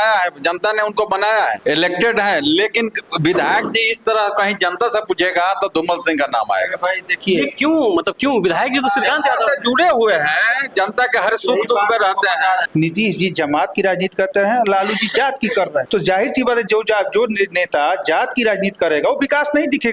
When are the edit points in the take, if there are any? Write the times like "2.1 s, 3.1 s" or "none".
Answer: 1.6 s, 12.7 s, 15.9 s